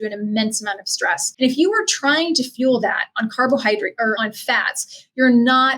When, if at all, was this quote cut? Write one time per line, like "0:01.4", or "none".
0:01.3
0:04.1